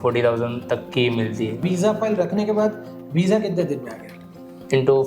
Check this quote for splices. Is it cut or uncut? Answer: cut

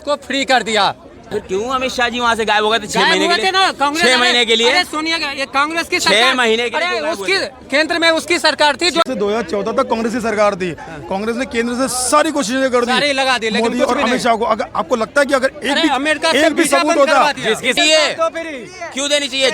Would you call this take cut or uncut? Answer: cut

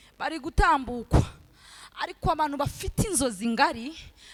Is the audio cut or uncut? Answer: uncut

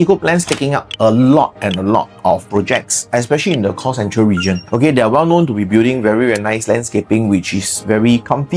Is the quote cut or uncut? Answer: uncut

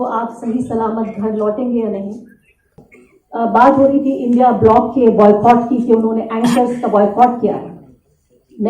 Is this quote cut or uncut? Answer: cut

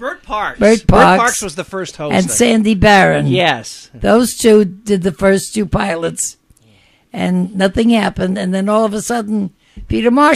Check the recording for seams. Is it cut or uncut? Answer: cut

